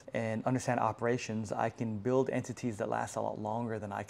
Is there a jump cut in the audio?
no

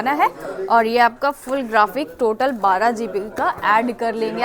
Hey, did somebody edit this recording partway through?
no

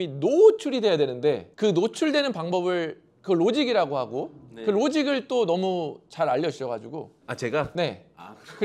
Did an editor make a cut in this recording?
yes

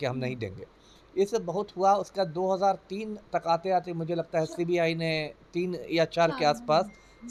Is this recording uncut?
yes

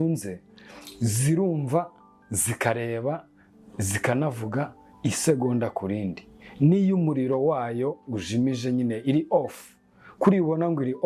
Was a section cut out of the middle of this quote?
no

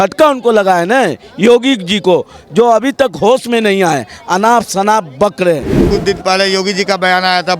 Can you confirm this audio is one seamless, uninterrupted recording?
no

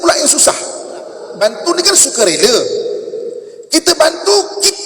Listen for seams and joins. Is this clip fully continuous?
no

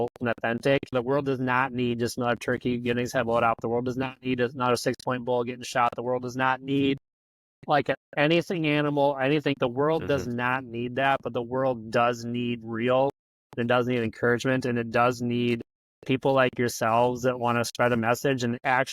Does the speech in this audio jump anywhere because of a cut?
yes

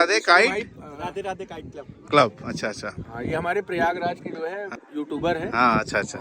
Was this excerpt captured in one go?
no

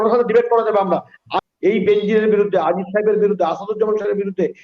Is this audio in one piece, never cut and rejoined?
no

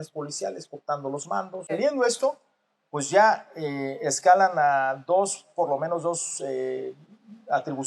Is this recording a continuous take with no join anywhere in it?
no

